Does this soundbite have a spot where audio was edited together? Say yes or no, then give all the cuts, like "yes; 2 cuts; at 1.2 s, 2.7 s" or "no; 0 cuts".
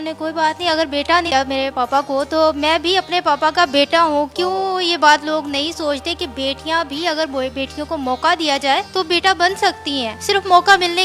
yes; 1 cut; at 1.3 s